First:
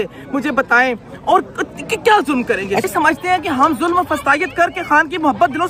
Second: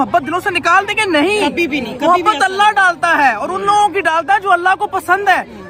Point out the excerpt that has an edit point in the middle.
first; 1 cut; at 2.8 s

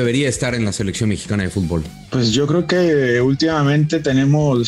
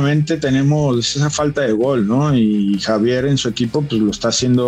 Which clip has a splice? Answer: first; 1 cut; at 2.0 s

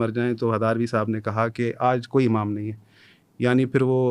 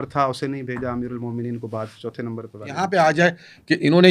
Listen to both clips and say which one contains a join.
second; 1 cut; at 2.8 s

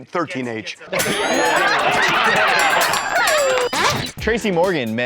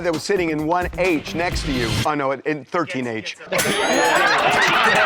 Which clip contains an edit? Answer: first; 1 cut; at 3.7 s

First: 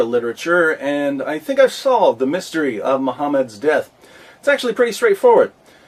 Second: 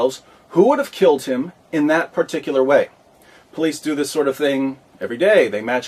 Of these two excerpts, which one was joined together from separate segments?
second; 1 cut; at 4.4 s

